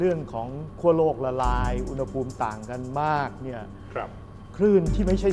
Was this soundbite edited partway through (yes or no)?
no